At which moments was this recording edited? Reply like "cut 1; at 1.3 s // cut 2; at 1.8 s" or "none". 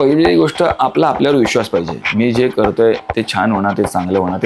none